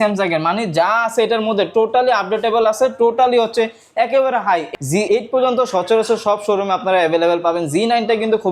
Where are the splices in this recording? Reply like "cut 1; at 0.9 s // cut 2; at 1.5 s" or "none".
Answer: cut 1; at 4.7 s